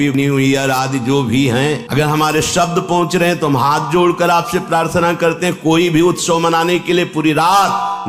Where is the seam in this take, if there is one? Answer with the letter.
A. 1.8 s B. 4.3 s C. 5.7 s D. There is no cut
A